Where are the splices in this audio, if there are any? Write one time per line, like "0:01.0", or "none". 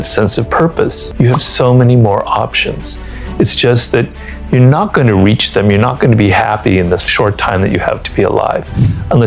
0:01.0
0:07.0